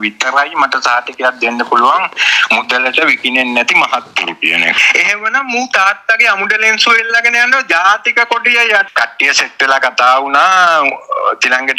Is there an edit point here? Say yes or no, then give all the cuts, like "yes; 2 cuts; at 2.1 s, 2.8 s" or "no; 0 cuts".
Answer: yes; 2 cuts; at 4.8 s, 8.9 s